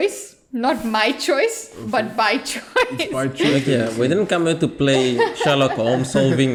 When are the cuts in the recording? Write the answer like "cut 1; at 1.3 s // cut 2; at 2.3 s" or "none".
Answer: none